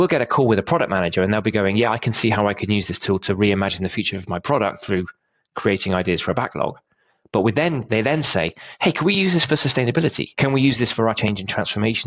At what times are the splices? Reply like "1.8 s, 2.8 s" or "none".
10.3 s, 11.2 s